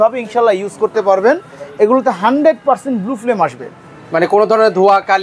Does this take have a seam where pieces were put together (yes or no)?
no